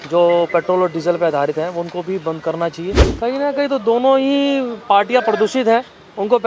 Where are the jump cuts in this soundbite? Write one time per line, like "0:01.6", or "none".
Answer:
0:03.0